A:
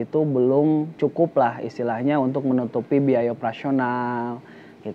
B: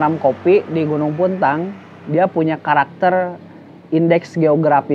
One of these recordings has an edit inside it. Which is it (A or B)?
A